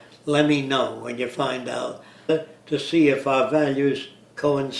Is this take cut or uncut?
uncut